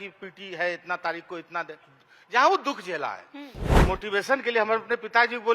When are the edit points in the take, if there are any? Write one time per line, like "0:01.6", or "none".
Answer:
0:03.7